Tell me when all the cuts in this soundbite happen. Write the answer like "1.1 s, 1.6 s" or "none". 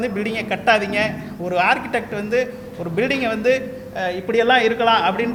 none